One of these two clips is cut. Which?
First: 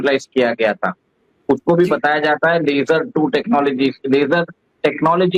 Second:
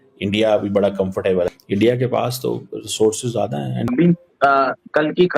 second; 1 cut; at 3.9 s

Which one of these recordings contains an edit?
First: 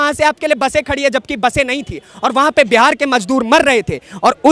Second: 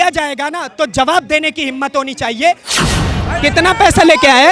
second; 1 cut; at 2.7 s

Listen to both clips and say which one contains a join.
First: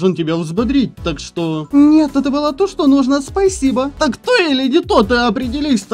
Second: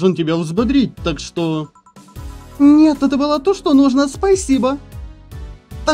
first; 2 cuts; at 1.6 s, 3.9 s

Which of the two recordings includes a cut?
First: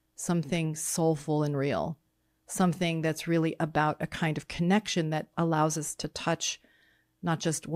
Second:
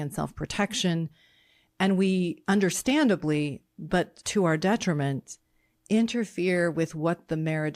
second; 2 cuts; at 2.4 s, 4.2 s

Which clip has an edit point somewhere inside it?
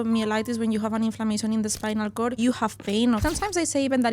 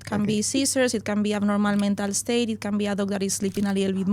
first; 2 cuts; at 2.3 s, 3.2 s

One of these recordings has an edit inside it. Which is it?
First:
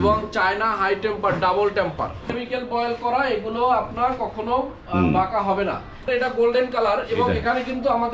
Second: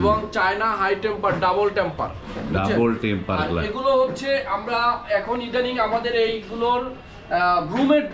first; 2 cuts; at 2.4 s, 6.1 s

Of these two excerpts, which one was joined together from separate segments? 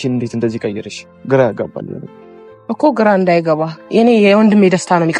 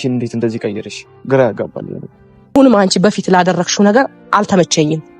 second; 1 cut; at 2.6 s

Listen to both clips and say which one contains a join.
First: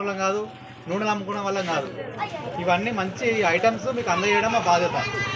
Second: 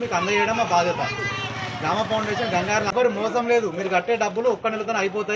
second; 1 cut; at 2.9 s

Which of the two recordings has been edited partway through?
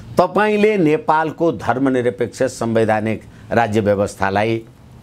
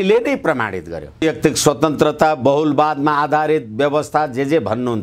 second; 1 cut; at 1.2 s

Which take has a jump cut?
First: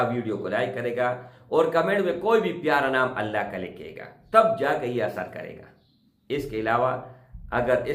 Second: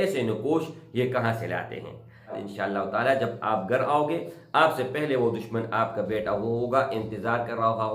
second; 1 cut; at 2.4 s

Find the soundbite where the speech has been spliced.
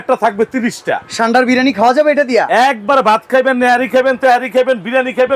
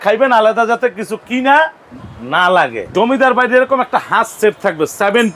second; 1 cut; at 2.9 s

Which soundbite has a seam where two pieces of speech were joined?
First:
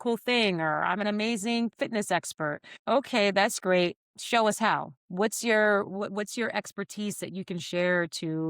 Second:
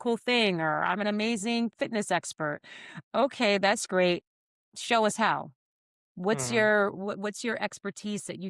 first; 3 cuts; at 2.7 s, 4.1 s, 5.0 s

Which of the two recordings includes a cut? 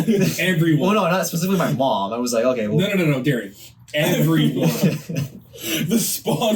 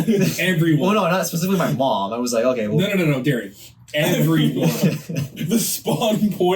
second; 1 cut; at 5.4 s

